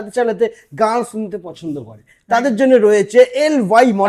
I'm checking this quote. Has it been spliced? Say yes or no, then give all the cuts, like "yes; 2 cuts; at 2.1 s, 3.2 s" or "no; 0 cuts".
no; 0 cuts